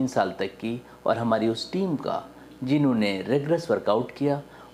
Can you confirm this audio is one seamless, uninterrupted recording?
yes; 0 cuts

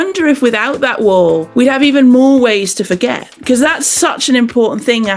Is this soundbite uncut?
no; 1 cut; at 1.5 s

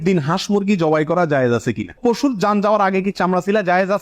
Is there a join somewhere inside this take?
yes; 1 cut; at 1.9 s

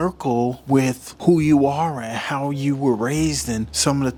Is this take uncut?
yes; 0 cuts

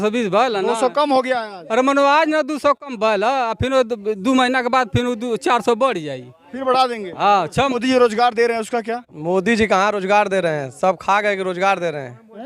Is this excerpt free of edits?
no; 1 cut; at 7.8 s

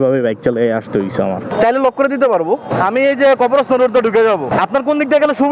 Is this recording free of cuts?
no; 3 cuts; at 1.5 s, 2.7 s, 4.5 s

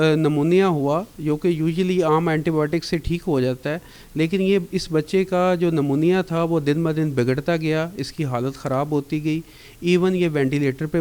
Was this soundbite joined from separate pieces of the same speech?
no; 0 cuts

